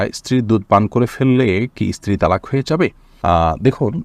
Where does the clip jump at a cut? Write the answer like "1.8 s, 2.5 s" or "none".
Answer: none